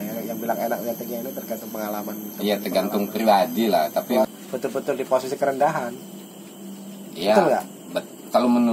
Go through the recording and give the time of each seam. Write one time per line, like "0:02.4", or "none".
0:04.2